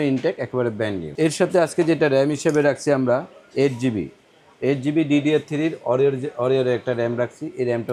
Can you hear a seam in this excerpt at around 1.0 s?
yes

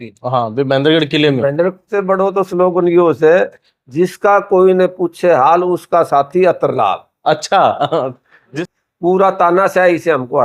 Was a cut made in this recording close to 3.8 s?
no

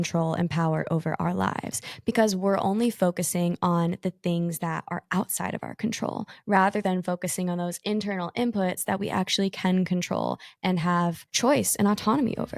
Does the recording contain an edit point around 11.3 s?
yes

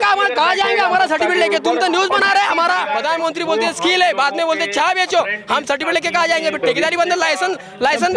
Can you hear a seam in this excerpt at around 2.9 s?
yes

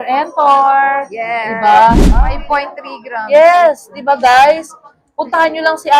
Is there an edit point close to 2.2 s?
yes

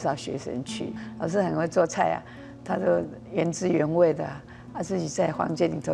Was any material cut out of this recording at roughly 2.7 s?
no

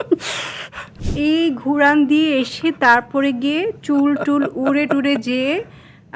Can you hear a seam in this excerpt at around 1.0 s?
yes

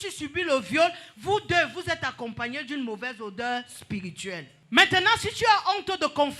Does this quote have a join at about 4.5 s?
yes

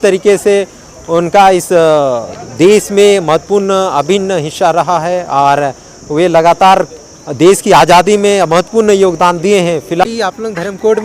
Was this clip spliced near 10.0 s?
yes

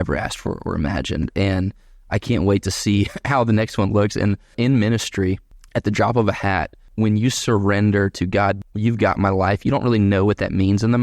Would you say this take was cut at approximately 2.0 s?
no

